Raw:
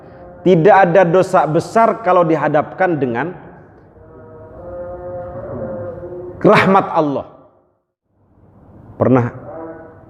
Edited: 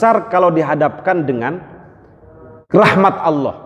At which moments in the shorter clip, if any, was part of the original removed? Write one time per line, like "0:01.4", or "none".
0:02.6

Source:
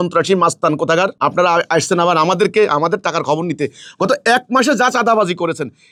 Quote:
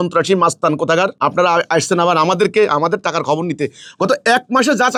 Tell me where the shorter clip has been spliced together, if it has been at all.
none

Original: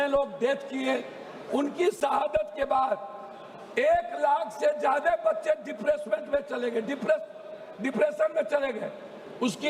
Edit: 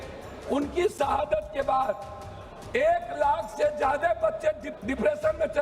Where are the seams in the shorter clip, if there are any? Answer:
0:04.7

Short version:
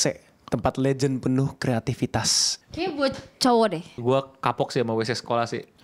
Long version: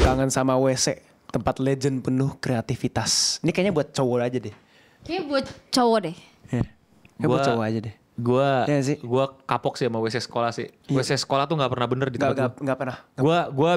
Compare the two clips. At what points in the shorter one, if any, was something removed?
0:02.4
0:04.0

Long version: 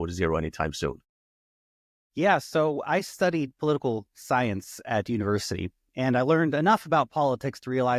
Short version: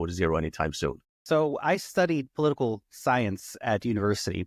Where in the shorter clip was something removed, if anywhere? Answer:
0:01.2

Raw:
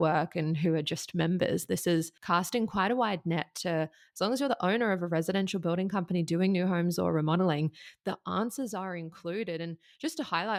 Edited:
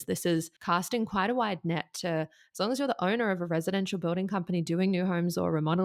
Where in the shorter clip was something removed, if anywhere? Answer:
none

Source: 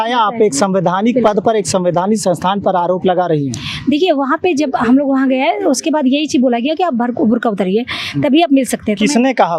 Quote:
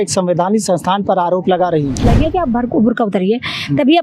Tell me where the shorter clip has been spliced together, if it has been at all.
0:02.1

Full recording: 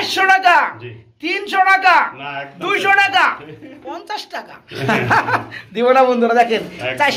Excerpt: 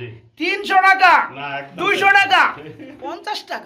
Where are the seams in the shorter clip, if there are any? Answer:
none

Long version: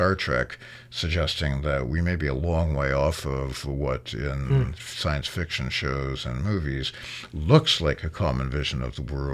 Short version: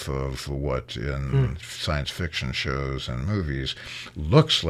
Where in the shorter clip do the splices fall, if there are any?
none

